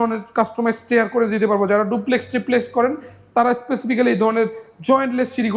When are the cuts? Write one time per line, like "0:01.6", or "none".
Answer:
none